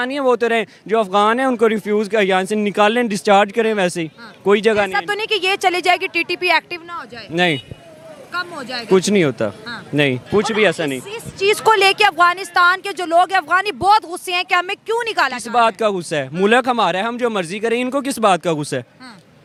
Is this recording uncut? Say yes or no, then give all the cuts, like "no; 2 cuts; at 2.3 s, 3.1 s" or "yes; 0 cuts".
yes; 0 cuts